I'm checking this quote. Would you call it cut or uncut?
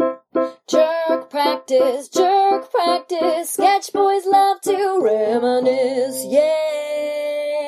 uncut